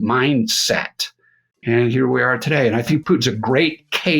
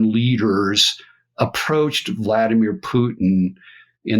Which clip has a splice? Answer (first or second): first